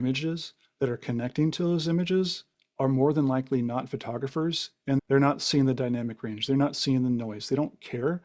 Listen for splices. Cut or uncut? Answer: cut